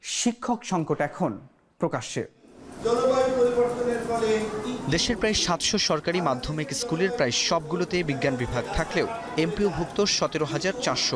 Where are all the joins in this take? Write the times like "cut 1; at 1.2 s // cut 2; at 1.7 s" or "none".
none